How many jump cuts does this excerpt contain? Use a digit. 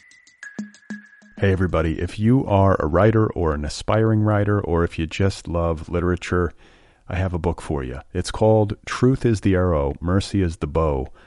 1